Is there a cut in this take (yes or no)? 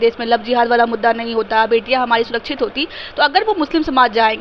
no